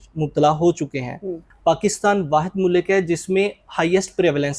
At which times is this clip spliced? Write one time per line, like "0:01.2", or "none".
0:01.4